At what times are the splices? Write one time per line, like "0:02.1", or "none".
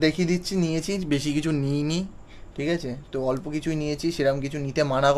none